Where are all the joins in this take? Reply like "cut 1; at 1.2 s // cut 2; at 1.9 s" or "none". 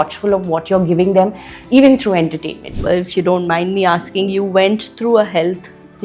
cut 1; at 2.7 s